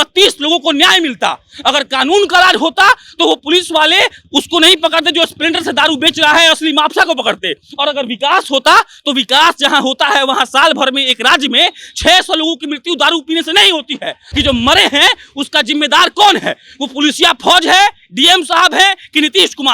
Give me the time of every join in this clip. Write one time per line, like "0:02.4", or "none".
0:14.2